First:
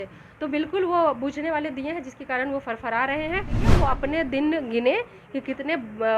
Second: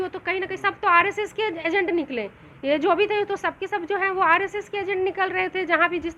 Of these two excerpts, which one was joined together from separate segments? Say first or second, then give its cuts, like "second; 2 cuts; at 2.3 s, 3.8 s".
first; 1 cut; at 3.7 s